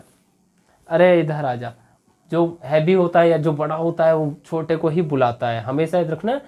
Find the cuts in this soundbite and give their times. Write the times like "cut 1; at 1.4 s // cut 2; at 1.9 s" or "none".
none